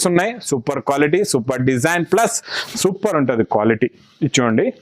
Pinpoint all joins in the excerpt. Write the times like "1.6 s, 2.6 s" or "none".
2.6 s